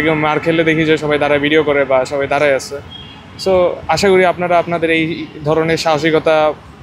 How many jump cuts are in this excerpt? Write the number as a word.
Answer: zero